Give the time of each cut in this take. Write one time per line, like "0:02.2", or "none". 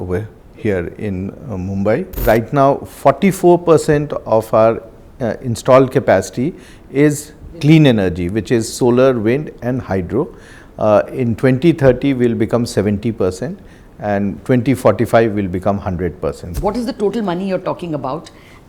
0:02.2
0:16.5